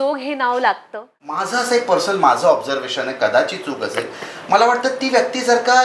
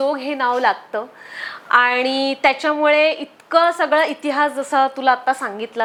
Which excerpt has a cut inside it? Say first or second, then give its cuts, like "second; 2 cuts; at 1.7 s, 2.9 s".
first; 1 cut; at 1.5 s